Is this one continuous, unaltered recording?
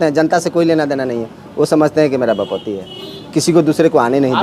yes; 0 cuts

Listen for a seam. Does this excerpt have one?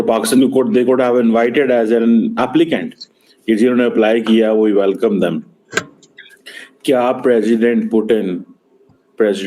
no; 0 cuts

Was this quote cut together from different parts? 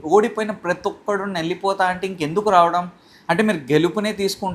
no; 0 cuts

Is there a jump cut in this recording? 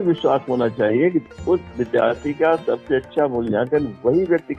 no; 0 cuts

